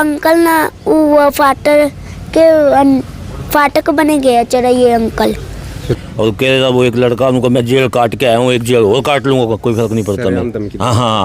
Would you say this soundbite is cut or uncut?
cut